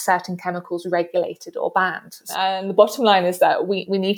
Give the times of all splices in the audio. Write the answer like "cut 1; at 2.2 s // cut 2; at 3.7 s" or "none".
cut 1; at 2.3 s